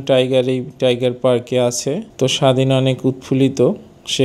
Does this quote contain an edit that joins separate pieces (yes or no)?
yes